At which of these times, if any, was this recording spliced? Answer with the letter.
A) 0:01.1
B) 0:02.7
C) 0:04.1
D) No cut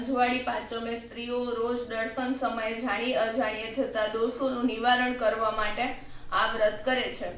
D